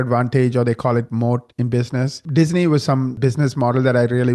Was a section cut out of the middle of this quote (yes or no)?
yes